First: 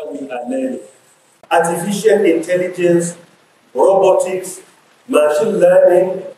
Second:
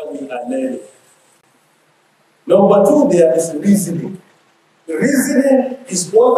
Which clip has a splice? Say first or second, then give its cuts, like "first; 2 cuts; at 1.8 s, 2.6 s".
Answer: first; 1 cut; at 1.3 s